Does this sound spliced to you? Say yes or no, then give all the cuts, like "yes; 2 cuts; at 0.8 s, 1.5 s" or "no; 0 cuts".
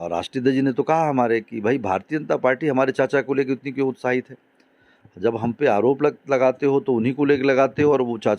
no; 0 cuts